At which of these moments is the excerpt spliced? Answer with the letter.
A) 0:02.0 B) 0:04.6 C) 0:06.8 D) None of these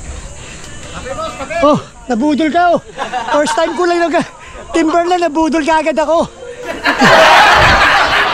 C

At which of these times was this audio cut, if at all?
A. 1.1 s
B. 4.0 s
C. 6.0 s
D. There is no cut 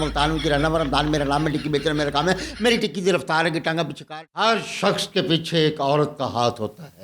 B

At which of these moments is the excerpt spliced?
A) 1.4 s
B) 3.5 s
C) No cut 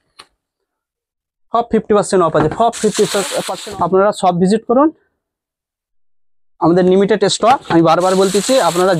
B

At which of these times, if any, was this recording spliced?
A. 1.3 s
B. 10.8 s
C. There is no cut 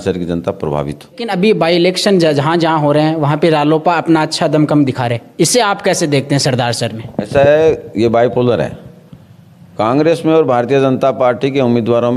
A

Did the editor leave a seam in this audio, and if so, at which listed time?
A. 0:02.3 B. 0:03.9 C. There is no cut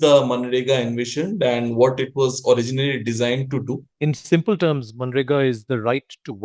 B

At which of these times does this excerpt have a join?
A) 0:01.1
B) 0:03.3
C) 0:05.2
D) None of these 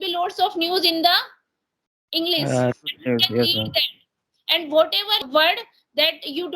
C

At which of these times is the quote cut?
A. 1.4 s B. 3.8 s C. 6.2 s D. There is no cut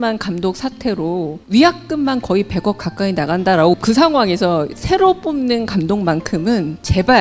B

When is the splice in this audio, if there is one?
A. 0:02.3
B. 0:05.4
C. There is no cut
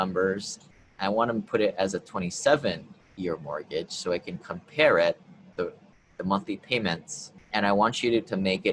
C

